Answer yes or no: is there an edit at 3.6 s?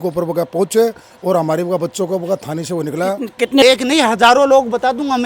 yes